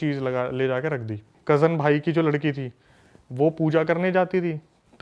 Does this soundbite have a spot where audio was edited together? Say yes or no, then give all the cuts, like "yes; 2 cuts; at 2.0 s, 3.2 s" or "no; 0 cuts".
yes; 1 cut; at 1.3 s